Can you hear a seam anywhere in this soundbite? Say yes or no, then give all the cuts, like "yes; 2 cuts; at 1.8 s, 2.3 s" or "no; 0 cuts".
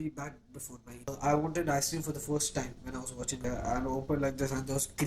yes; 2 cuts; at 1.1 s, 3.4 s